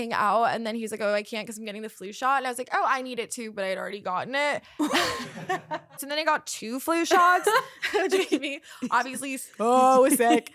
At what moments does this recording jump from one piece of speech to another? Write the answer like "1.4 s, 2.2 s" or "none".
6.0 s